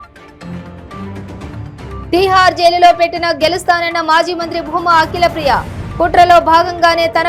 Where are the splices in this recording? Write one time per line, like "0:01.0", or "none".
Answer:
none